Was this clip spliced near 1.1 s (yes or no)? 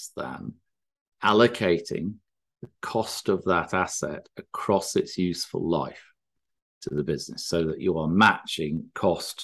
yes